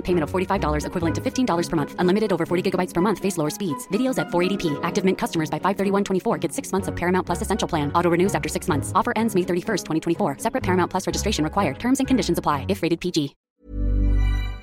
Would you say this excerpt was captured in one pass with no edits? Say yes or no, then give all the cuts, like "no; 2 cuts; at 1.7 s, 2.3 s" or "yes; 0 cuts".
no; 1 cut; at 13.4 s